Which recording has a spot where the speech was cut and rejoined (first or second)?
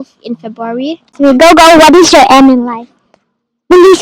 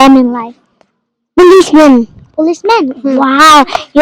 first